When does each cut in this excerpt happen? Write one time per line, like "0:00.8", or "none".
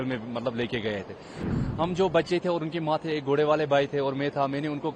0:01.4